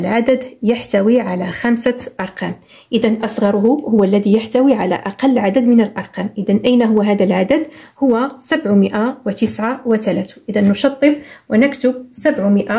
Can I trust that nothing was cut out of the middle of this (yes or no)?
yes